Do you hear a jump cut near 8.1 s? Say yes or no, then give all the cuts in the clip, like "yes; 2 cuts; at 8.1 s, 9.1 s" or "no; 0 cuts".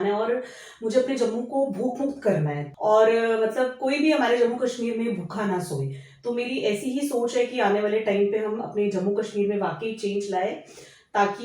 no; 1 cut; at 2.6 s